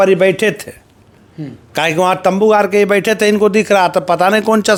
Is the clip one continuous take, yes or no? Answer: yes